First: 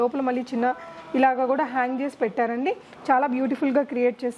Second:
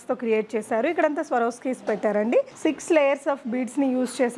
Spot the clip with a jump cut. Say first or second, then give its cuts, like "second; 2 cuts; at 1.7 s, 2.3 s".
second; 1 cut; at 2.5 s